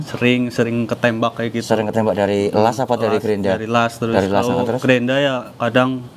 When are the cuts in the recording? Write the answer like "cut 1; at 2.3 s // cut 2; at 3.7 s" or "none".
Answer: none